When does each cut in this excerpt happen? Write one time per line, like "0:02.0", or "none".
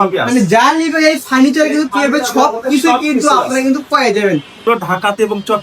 0:04.6